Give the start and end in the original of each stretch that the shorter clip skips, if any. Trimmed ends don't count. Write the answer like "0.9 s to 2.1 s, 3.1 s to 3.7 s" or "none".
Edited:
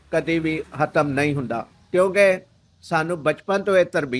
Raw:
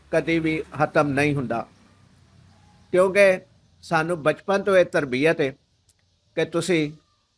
1.7 s to 2.7 s